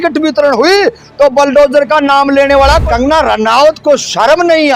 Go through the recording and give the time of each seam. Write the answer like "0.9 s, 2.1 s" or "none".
2.8 s